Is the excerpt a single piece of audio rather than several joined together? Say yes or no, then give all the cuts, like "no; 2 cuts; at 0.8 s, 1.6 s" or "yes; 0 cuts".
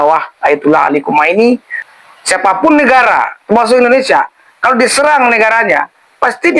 no; 1 cut; at 1.8 s